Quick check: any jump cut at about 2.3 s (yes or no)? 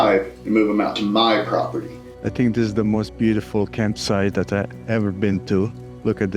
yes